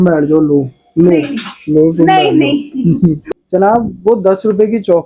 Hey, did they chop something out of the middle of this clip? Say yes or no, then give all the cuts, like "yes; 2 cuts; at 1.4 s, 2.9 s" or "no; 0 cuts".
yes; 1 cut; at 3.2 s